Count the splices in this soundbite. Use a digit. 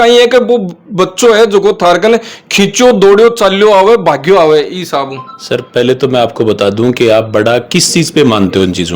0